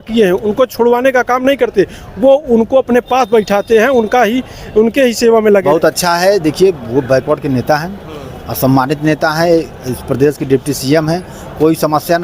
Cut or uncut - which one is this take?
cut